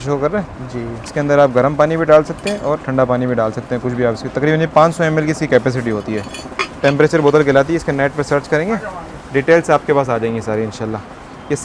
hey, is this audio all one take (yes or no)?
yes